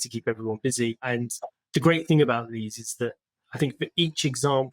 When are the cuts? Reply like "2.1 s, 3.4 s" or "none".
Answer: 1.0 s